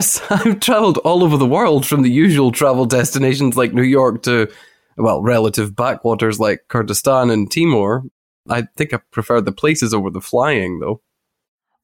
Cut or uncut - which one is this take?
cut